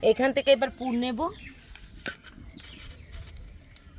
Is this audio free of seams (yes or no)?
yes